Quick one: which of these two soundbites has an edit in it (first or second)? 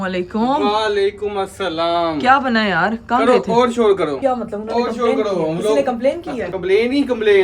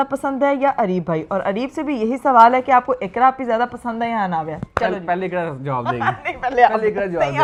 first